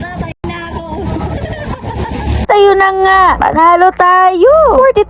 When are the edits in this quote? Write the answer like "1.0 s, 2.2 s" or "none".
2.5 s